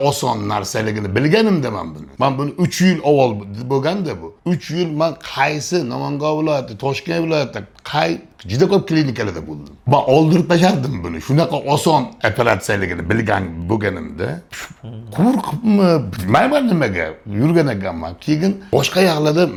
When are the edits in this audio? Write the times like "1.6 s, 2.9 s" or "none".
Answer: none